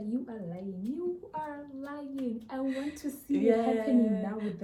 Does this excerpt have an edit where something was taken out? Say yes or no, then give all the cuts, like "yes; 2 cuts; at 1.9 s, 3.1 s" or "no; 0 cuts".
no; 0 cuts